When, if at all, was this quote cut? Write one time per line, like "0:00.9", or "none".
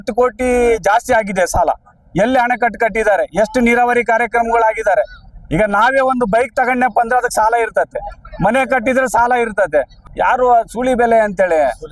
0:10.0